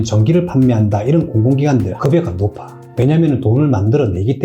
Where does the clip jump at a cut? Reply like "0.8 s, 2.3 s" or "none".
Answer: 1.9 s

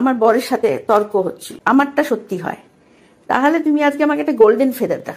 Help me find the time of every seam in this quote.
1.5 s

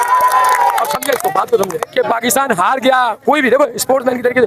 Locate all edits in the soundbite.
1.8 s

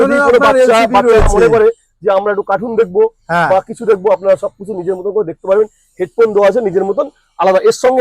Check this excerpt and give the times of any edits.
none

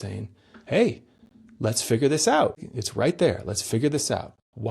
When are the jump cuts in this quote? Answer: 2.6 s

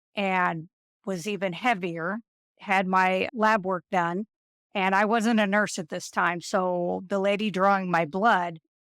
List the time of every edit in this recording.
3.3 s

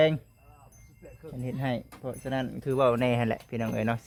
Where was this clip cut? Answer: none

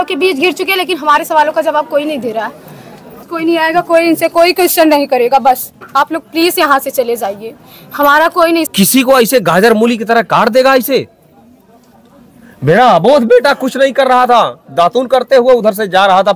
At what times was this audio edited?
3.3 s, 8.7 s

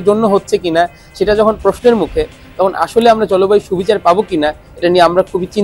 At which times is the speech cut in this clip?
none

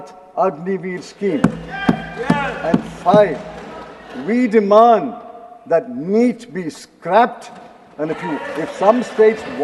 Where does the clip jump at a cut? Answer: none

